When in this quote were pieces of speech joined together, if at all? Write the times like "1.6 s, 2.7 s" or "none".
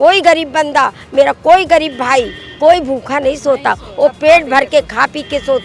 none